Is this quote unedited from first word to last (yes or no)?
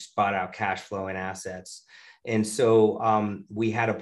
yes